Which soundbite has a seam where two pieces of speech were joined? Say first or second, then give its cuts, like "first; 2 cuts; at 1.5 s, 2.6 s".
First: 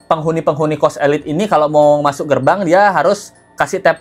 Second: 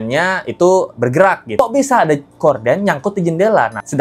second; 1 cut; at 1.5 s